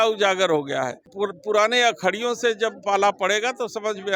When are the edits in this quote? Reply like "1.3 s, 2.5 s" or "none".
1.0 s